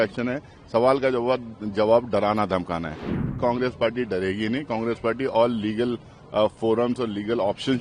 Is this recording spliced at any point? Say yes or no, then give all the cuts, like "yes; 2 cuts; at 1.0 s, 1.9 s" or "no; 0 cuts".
yes; 1 cut; at 3.4 s